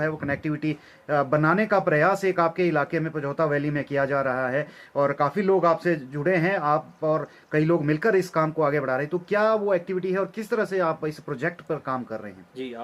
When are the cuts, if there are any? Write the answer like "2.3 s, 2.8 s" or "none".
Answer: none